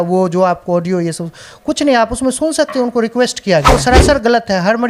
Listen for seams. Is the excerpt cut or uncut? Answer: cut